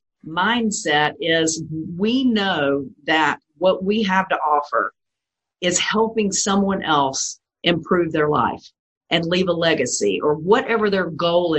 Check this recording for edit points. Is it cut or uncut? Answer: uncut